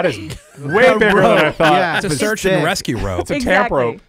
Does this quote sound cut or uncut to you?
cut